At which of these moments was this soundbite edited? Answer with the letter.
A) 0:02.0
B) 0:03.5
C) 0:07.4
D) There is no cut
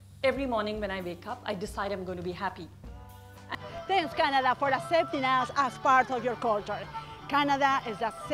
B